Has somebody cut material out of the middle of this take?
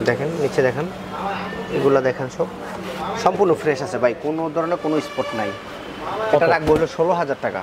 no; 0 cuts

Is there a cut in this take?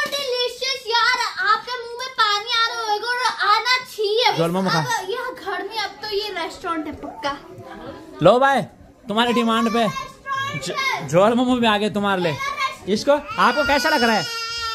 yes; 2 cuts; at 4.4 s, 12.8 s

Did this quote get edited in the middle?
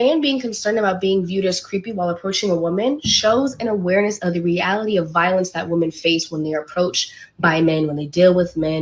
no; 0 cuts

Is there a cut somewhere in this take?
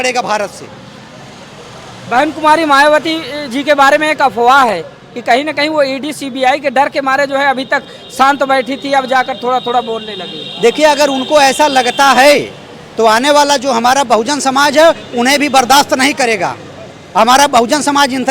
no; 0 cuts

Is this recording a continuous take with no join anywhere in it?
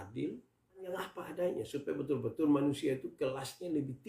no; 1 cut; at 0.9 s

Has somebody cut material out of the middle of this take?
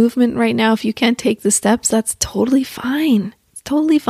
no; 0 cuts

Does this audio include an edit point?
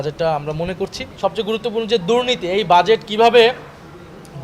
yes; 1 cut; at 1.0 s

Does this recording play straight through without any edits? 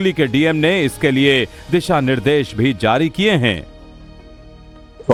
yes; 0 cuts

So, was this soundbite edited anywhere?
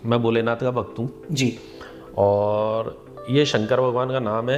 no; 0 cuts

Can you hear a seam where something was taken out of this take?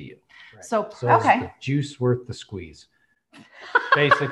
yes; 1 cut; at 0.9 s

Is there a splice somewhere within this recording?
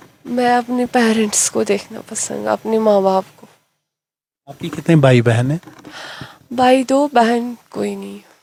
no; 0 cuts

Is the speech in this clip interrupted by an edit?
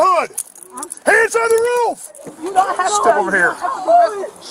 no; 0 cuts

